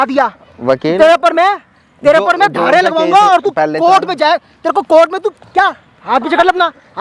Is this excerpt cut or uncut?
uncut